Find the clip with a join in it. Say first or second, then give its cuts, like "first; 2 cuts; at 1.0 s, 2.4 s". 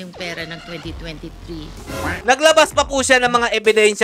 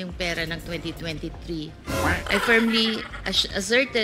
first; 1 cut; at 2.1 s